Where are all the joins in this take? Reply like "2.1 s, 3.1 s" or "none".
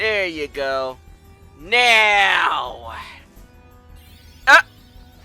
none

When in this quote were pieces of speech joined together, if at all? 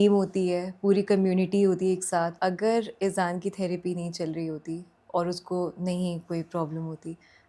2.4 s

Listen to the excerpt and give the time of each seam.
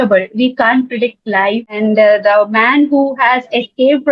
1.7 s

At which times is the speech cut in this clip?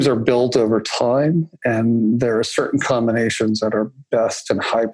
none

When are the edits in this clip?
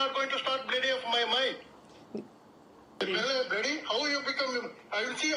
none

